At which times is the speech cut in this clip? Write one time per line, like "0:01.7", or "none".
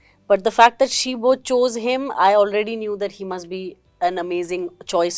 none